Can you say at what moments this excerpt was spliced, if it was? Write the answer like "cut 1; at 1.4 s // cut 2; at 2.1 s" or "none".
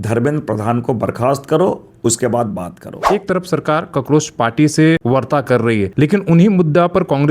cut 1; at 3.0 s // cut 2; at 5.0 s // cut 3; at 5.9 s